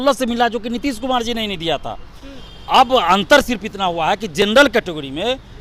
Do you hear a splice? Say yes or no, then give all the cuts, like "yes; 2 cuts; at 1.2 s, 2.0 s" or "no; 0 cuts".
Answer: no; 0 cuts